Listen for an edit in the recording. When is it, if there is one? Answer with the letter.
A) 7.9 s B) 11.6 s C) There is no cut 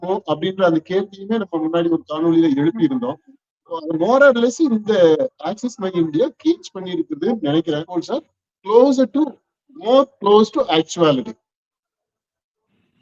A